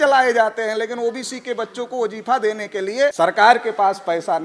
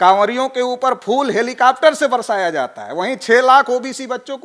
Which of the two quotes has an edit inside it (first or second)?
first